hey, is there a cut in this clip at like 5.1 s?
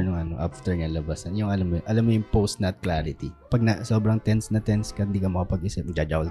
no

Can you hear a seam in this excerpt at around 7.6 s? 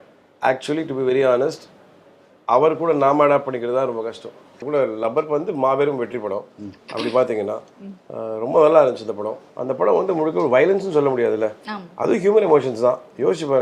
no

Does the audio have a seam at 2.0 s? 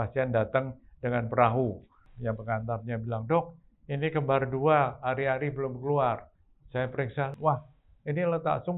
yes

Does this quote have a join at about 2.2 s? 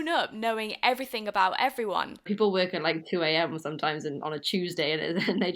yes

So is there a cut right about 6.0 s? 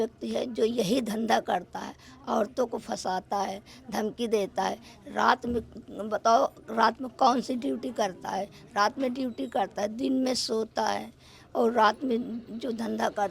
no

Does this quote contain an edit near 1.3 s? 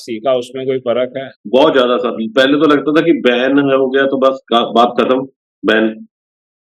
yes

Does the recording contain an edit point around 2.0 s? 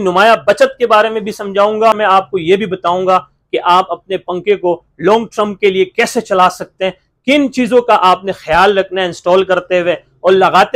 yes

